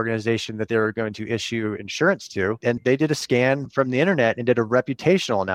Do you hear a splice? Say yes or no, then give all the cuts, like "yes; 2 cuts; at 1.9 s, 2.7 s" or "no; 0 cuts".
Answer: no; 0 cuts